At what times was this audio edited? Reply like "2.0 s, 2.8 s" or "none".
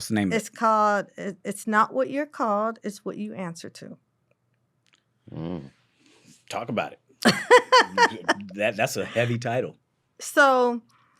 none